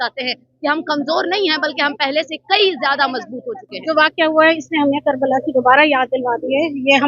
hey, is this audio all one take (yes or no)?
no